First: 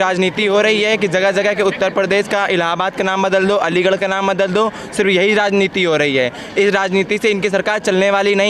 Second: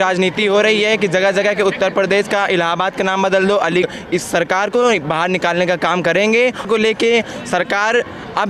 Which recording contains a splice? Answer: second; 2 cuts; at 3.8 s, 6.7 s

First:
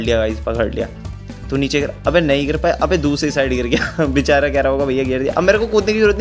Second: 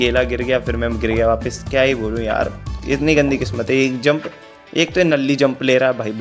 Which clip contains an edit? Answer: first; 1 cut; at 2.8 s

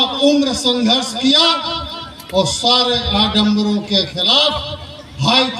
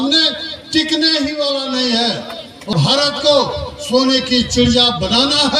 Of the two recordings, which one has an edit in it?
second; 1 cut; at 2.7 s

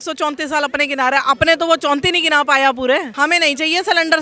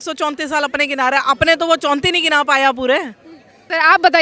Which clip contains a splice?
first; 1 cut; at 3.1 s

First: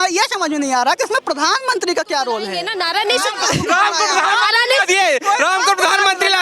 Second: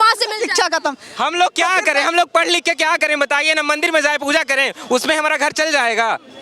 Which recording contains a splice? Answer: first; 1 cut; at 2.7 s

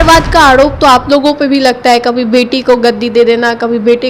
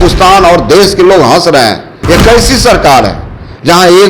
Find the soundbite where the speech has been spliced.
second; 1 cut; at 1.9 s

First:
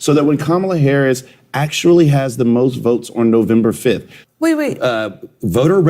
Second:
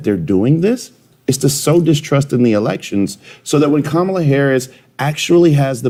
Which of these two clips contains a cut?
first; 1 cut; at 4.1 s

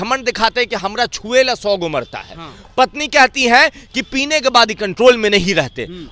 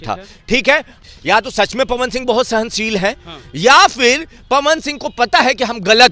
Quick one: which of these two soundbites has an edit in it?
second; 1 cut; at 1.0 s

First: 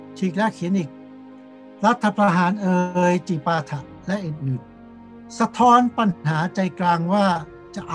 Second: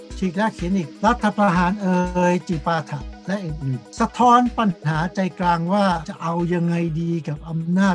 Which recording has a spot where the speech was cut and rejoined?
second; 3 cuts; at 0.9 s, 3.8 s, 6.1 s

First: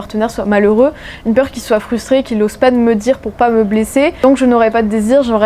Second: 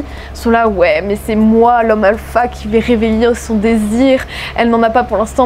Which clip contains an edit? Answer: first; 1 cut; at 4.2 s

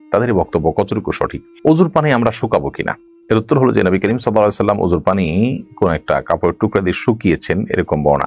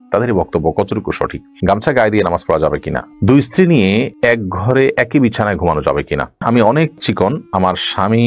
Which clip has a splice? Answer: second; 3 cuts; at 1.6 s, 3.0 s, 6.4 s

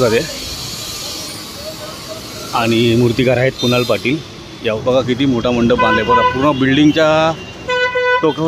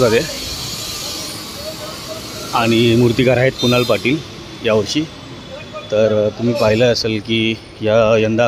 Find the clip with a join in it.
first; 1 cut; at 4.8 s

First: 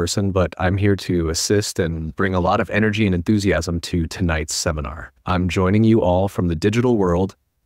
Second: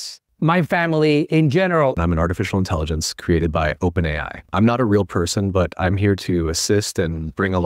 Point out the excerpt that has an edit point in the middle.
second; 1 cut; at 2.0 s

